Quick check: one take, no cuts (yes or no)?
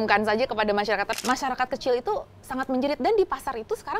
no